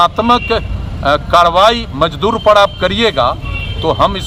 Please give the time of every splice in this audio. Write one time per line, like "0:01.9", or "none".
none